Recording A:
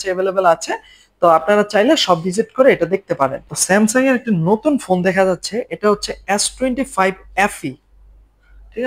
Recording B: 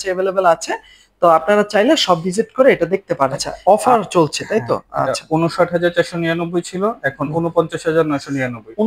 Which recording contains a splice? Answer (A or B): B